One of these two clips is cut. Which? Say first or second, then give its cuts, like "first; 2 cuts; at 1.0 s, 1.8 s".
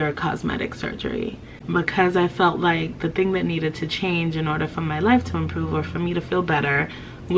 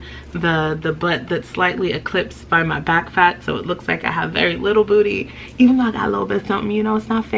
first; 1 cut; at 1.5 s